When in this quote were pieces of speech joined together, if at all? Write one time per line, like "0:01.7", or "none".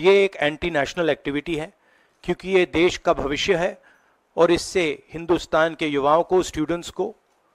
none